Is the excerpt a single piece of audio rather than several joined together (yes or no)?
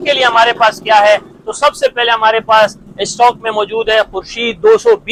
yes